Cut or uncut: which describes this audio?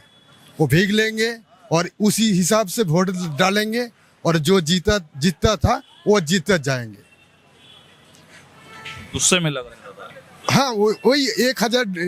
uncut